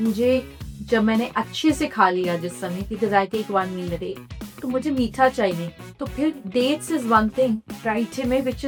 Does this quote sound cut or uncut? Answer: uncut